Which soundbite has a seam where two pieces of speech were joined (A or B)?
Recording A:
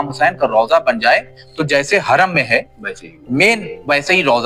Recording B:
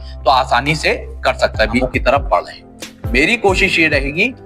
B